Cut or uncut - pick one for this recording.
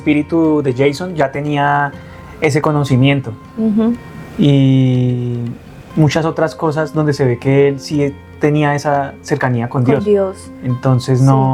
uncut